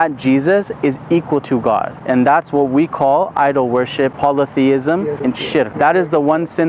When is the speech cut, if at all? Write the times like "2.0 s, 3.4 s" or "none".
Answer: 1.9 s, 4.1 s, 5.3 s